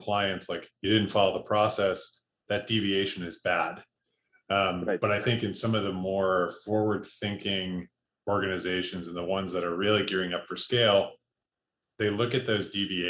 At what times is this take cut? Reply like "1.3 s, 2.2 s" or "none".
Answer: none

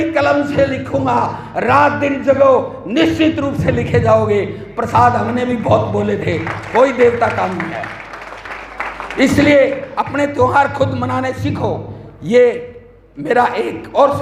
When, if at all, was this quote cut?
none

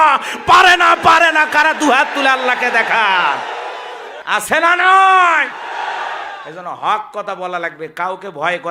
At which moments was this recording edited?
4.1 s

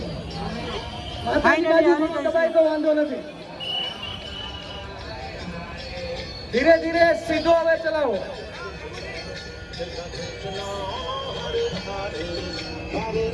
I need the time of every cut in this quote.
none

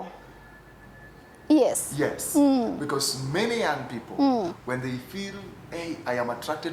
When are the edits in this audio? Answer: none

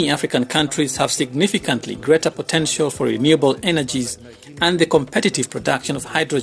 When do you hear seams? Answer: none

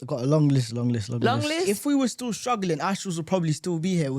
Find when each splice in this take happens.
1.7 s

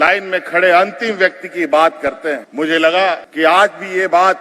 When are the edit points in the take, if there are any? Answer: 2.5 s, 3.3 s

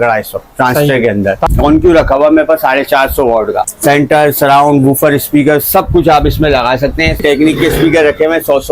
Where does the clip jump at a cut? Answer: 1.4 s, 3.7 s, 7.2 s

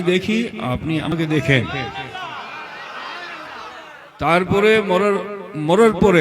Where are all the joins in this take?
1.1 s

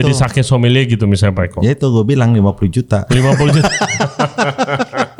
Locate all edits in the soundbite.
none

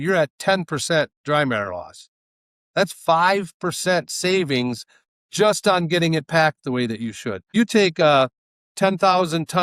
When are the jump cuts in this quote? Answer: 7.5 s

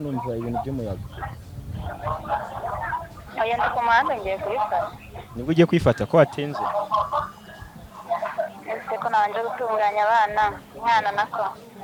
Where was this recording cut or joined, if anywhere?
none

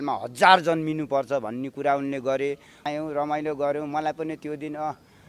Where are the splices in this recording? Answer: 2.9 s

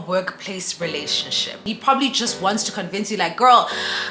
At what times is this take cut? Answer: 1.7 s

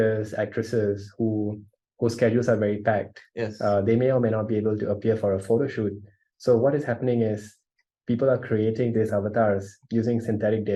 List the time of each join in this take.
none

